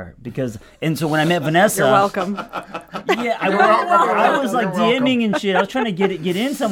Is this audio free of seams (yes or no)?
yes